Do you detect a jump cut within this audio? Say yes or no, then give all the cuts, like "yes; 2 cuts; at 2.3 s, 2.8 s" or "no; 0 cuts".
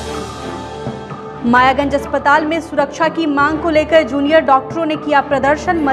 yes; 1 cut; at 1.3 s